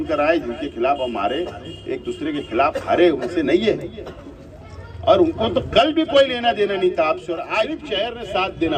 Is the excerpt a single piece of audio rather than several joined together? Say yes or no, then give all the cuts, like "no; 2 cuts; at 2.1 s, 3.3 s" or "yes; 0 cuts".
no; 1 cut; at 7.8 s